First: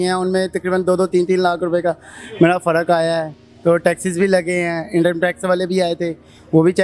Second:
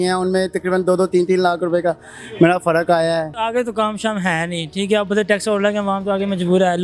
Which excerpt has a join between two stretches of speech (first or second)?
second